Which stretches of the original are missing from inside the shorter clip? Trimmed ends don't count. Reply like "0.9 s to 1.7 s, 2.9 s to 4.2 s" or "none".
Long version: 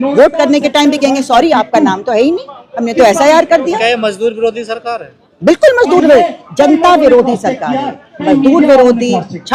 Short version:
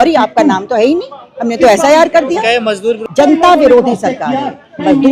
4.4 s to 6.4 s